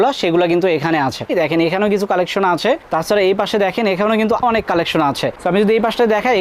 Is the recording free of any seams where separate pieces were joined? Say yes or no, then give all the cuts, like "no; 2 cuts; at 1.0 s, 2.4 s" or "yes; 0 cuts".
no; 2 cuts; at 1.3 s, 4.4 s